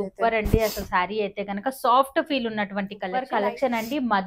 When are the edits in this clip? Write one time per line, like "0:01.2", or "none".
0:03.1